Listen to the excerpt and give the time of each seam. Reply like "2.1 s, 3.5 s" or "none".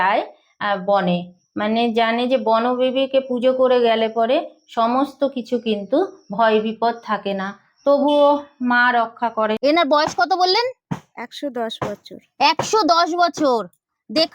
9.6 s